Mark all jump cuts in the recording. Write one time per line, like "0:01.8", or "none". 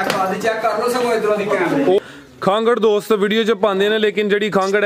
0:02.0